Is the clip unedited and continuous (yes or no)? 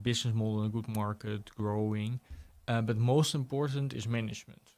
yes